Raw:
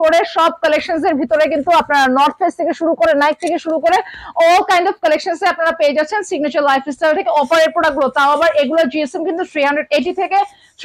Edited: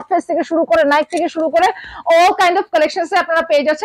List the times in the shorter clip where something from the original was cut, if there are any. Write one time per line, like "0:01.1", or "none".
none